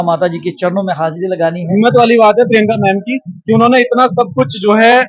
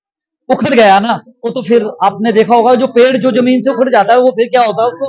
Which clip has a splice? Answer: first; 1 cut; at 1.6 s

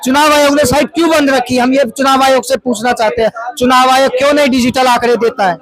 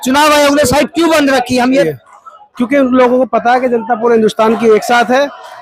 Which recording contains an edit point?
second; 1 cut; at 1.9 s

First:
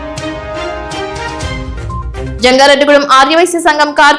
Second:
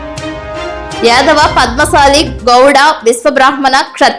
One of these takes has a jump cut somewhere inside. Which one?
second; 1 cut; at 1.0 s

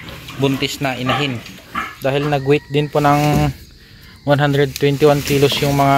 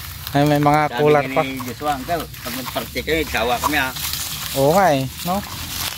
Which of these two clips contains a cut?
first; 1 cut; at 1.5 s

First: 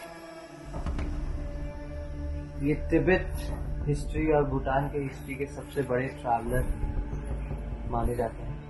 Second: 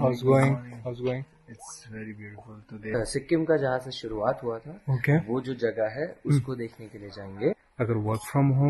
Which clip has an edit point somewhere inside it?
second; 2 cuts; at 2.9 s, 7.7 s

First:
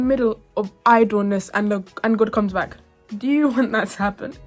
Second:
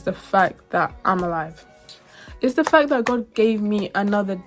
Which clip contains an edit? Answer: second; 1 cut; at 2.1 s

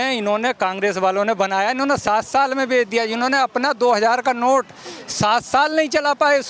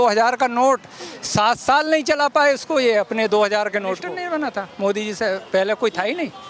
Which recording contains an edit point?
second; 1 cut; at 4.1 s

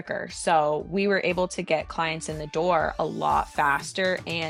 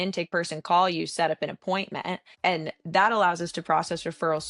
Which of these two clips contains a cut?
second; 1 cut; at 2.3 s

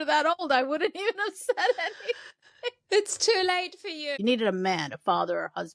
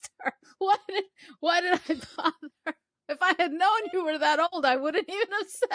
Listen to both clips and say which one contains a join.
first; 1 cut; at 4.2 s

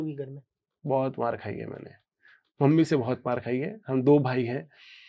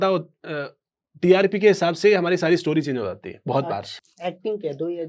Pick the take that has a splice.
second; 1 cut; at 3.9 s

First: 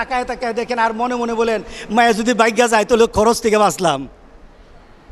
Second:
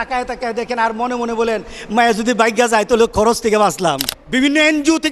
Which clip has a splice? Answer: second; 1 cut; at 4.1 s

